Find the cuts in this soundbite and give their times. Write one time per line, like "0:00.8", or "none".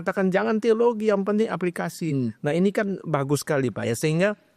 none